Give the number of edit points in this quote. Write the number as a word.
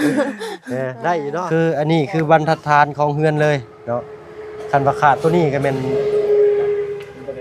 one